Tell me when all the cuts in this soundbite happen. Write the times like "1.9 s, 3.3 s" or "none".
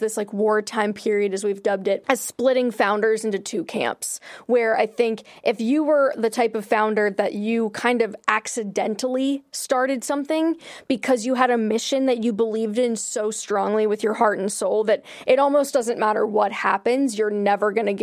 2.0 s